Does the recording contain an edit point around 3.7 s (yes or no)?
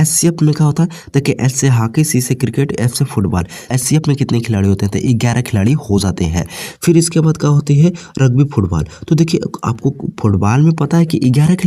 yes